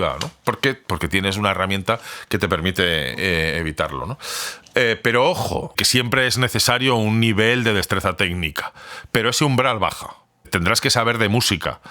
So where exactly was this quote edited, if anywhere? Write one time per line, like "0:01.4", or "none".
0:05.8
0:10.5